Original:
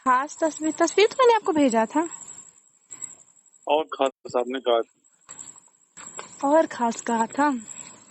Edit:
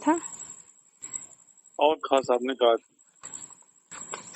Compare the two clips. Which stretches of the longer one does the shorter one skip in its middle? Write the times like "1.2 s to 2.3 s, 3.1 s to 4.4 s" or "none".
4.1 s to 4.3 s